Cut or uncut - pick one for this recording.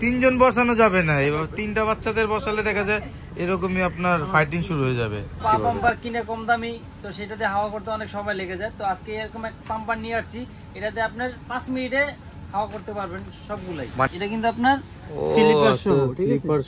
cut